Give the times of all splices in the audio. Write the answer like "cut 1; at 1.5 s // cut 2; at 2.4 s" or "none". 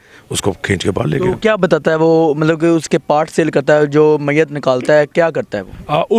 none